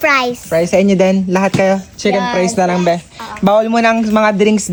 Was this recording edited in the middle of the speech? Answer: no; 0 cuts

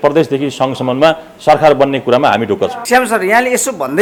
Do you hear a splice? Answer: no; 0 cuts

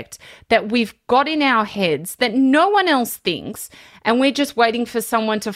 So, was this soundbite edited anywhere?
no; 0 cuts

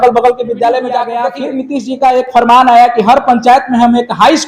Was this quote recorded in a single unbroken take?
no; 1 cut; at 1.1 s

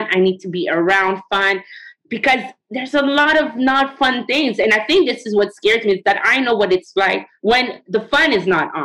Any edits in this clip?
yes; 2 cuts; at 2.5 s, 7.5 s

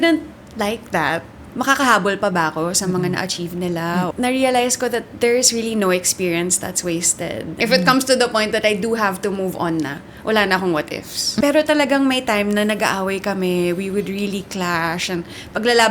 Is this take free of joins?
no; 4 cuts; at 1.4 s, 4.1 s, 7.6 s, 11.3 s

